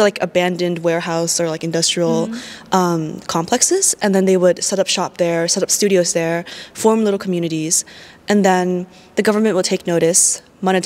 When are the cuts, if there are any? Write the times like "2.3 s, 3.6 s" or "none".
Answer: none